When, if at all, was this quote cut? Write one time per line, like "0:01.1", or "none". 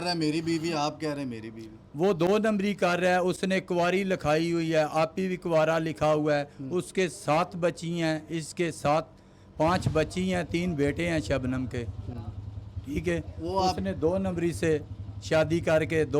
none